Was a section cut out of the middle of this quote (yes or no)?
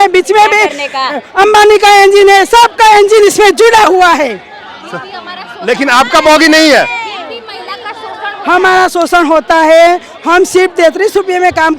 no